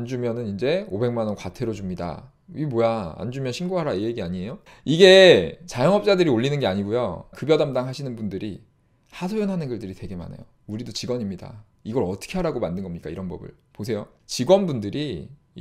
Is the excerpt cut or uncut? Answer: cut